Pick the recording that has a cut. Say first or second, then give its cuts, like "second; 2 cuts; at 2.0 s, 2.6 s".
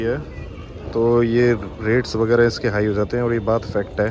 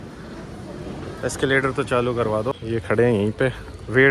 second; 1 cut; at 2.6 s